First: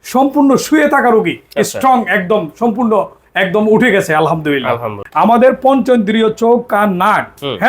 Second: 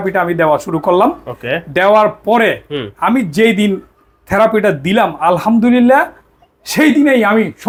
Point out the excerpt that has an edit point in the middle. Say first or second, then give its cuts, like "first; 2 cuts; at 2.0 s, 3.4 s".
first; 1 cut; at 4.9 s